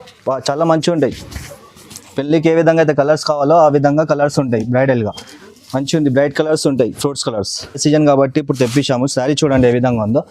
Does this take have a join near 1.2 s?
no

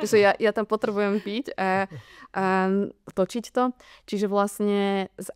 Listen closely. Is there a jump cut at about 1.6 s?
no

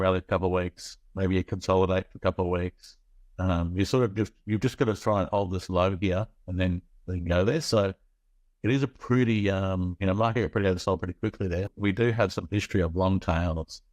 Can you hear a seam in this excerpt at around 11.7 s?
yes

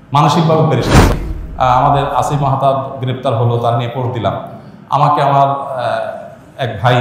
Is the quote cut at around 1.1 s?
yes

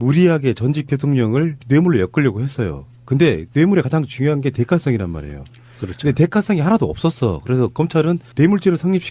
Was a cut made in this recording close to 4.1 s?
yes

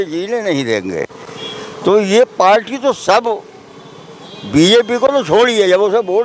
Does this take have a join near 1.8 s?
no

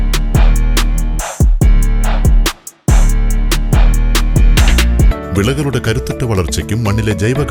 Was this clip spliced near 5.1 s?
yes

